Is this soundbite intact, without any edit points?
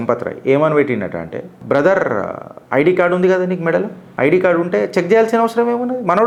yes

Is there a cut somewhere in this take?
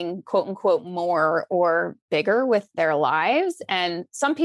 no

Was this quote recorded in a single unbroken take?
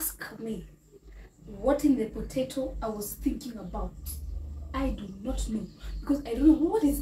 yes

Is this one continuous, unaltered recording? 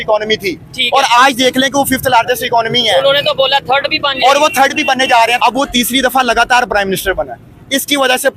no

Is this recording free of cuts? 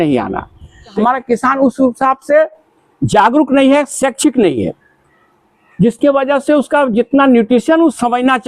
no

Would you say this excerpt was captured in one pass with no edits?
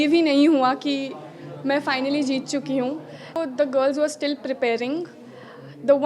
no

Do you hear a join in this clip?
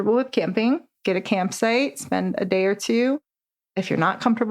yes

